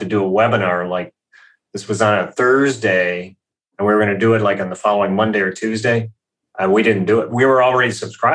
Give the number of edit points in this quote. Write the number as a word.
one